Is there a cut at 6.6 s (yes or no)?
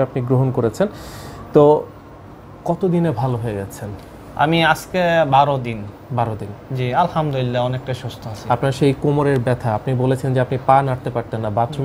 no